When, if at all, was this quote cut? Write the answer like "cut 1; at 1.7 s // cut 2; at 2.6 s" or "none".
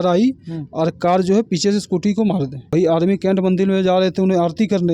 cut 1; at 2.7 s